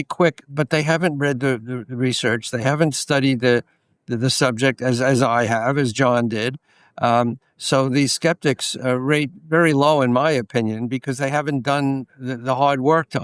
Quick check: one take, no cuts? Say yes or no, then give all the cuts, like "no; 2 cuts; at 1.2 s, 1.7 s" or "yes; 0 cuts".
yes; 0 cuts